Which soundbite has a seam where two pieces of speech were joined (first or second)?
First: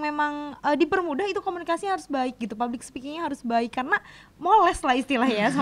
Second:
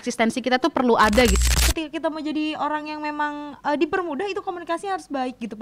second